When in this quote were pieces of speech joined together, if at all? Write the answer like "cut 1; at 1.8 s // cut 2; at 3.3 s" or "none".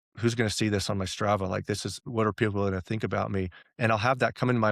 cut 1; at 2.0 s // cut 2; at 3.6 s